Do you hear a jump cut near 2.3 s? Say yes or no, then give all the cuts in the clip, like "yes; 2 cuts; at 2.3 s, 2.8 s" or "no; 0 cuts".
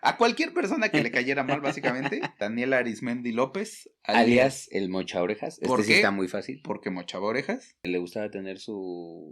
yes; 2 cuts; at 2.3 s, 7.9 s